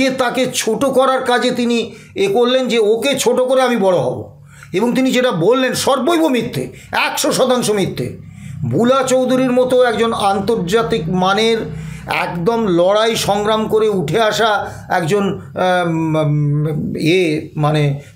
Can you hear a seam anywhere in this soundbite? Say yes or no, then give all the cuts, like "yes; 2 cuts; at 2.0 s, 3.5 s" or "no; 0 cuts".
no; 0 cuts